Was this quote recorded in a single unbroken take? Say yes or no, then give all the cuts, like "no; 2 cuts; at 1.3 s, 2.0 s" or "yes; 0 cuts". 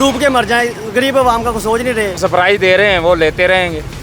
no; 1 cut; at 2.2 s